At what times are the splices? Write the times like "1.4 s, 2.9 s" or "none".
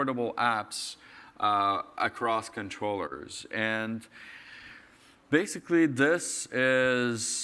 none